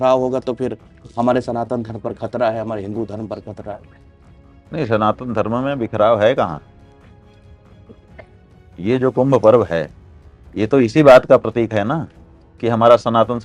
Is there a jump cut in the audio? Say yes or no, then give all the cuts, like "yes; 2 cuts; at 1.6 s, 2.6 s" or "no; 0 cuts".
no; 0 cuts